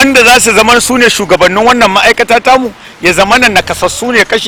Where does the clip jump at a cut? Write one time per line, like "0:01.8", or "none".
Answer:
none

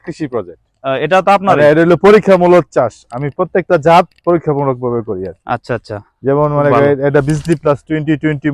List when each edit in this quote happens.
none

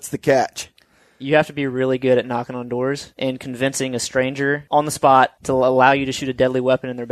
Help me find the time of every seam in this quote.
0:03.1
0:04.6
0:05.4

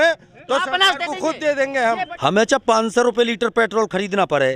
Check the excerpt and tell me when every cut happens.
0:02.1

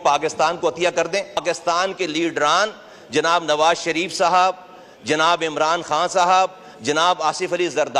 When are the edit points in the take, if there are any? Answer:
0:01.4

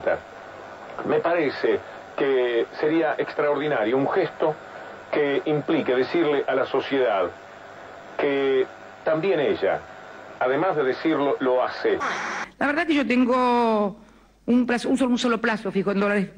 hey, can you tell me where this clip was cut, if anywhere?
none

